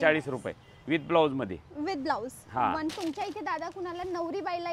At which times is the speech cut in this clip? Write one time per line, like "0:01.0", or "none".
0:02.9